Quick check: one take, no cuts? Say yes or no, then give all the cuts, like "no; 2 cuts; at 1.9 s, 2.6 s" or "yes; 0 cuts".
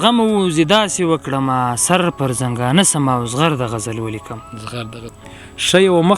no; 1 cut; at 5.1 s